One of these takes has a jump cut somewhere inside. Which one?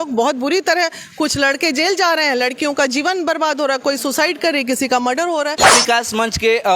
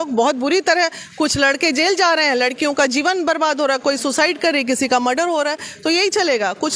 first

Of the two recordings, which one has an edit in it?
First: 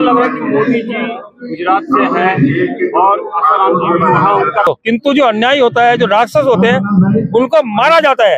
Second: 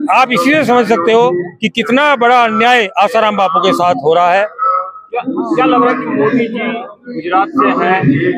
first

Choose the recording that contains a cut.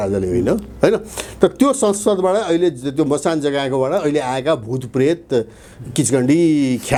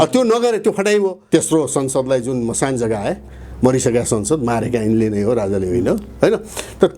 second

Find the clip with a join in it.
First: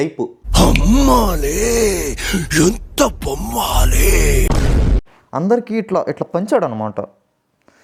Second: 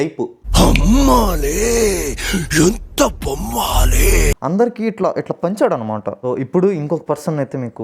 second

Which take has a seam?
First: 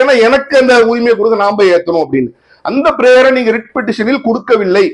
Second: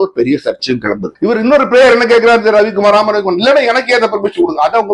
second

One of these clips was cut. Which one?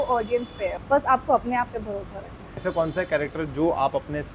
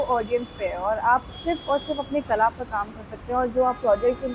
first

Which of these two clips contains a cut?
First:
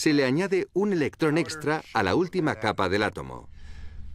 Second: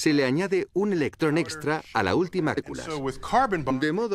first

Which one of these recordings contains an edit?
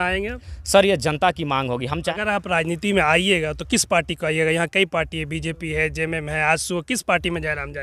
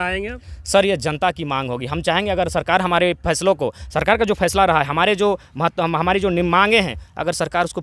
first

